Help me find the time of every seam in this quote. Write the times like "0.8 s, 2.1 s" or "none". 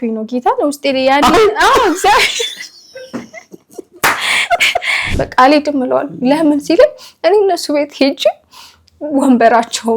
5.0 s